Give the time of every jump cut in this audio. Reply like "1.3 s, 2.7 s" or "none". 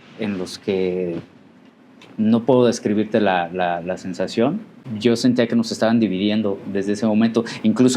4.8 s